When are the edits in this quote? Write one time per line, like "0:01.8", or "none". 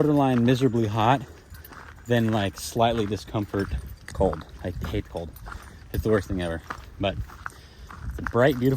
none